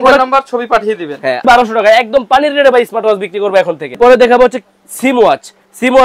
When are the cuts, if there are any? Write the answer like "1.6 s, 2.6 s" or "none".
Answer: 1.4 s, 4.0 s